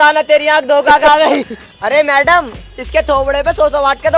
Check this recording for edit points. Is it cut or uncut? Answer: cut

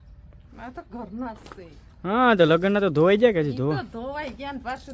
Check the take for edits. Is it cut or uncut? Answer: uncut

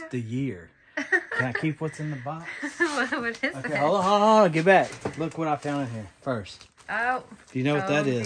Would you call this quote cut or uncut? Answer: uncut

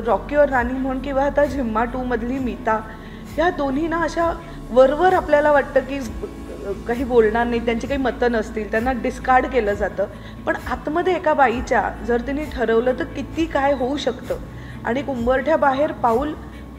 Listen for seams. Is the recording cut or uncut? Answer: uncut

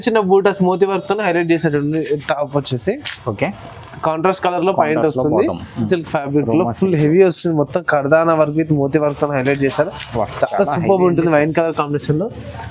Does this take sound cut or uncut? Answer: cut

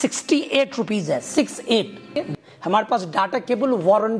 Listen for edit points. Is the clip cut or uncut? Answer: cut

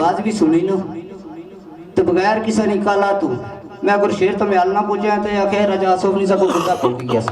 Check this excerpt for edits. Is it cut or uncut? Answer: uncut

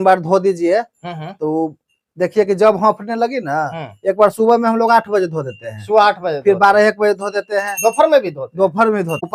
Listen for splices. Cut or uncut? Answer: uncut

